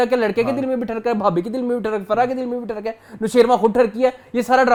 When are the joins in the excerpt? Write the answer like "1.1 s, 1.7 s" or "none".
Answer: none